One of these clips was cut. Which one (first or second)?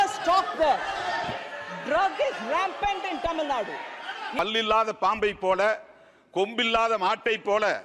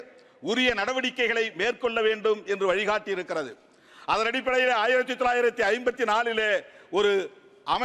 first